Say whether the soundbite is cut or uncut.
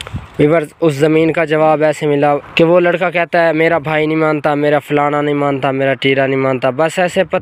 cut